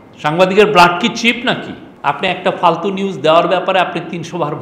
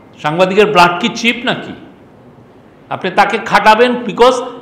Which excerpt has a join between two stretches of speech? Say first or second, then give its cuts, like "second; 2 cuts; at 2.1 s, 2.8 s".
first; 1 cut; at 1.8 s